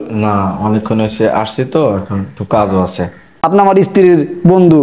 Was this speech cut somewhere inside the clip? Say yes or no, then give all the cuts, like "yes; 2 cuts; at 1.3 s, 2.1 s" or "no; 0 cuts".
yes; 1 cut; at 3.4 s